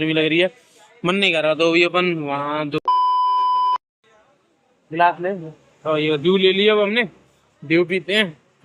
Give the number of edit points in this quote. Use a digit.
2